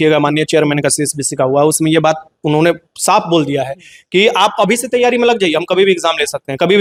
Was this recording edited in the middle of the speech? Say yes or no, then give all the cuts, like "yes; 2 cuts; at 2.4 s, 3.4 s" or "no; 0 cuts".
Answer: no; 0 cuts